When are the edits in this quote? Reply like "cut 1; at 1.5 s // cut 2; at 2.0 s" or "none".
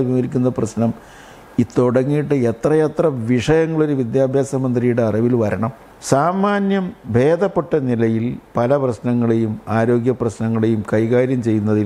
cut 1; at 5.9 s